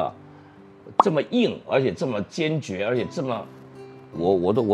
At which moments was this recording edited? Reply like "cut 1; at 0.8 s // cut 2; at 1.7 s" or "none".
none